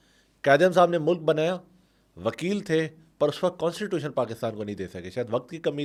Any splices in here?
no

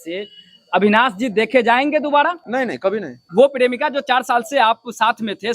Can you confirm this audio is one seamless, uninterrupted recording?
yes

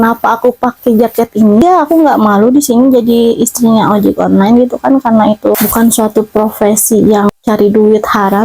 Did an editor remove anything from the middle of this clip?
yes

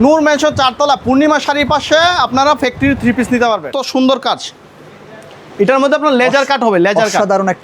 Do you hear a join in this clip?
yes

